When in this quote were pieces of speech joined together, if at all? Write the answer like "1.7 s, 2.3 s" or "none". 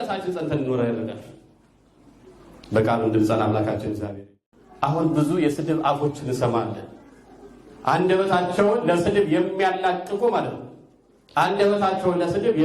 4.2 s